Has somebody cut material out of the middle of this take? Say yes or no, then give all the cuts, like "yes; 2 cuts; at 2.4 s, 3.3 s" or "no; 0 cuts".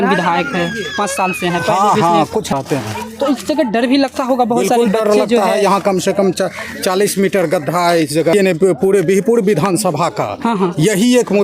yes; 2 cuts; at 2.5 s, 8.3 s